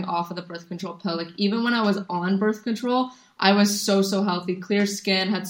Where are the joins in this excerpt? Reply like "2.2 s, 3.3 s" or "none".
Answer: none